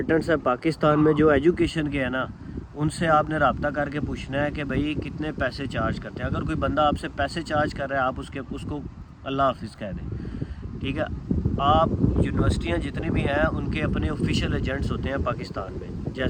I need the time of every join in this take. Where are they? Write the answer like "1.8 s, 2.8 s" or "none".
none